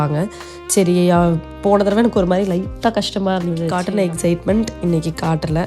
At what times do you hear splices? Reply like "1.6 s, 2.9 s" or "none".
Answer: 3.7 s